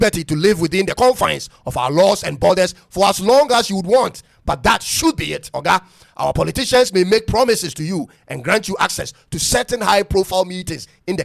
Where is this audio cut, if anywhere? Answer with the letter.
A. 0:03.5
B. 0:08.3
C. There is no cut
C